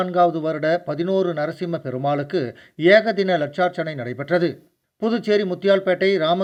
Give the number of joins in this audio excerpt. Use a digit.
0